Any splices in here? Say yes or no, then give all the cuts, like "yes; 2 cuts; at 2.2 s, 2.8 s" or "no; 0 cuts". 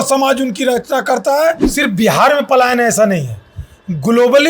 yes; 1 cut; at 1.7 s